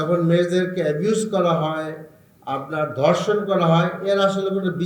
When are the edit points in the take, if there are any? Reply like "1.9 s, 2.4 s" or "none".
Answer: none